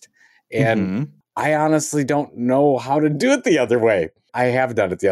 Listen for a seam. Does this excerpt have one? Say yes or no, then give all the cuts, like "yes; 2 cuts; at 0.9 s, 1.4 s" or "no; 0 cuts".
yes; 2 cuts; at 1.2 s, 4.3 s